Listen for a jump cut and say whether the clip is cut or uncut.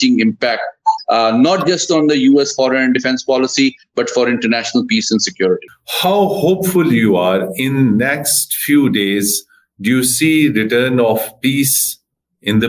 cut